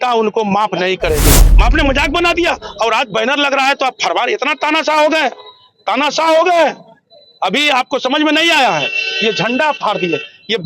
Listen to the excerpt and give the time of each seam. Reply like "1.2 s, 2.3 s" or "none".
1.5 s